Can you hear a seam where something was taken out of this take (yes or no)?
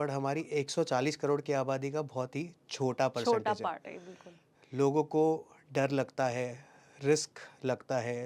no